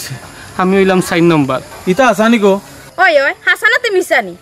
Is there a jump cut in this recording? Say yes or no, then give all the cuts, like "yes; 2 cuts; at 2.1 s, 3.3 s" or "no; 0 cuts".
yes; 1 cut; at 1.7 s